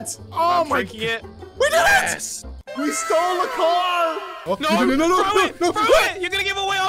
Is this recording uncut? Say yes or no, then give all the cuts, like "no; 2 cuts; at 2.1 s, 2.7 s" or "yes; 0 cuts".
no; 1 cut; at 4.3 s